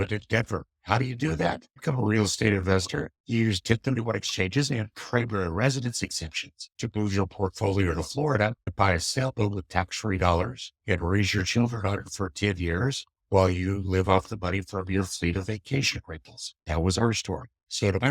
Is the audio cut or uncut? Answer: uncut